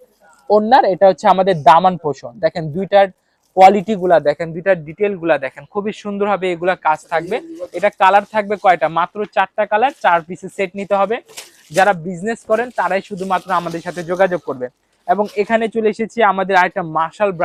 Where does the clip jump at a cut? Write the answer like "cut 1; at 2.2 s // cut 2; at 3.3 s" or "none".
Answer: none